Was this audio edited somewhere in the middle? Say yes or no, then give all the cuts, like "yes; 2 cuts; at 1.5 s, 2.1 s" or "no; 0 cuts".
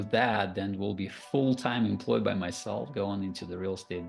no; 0 cuts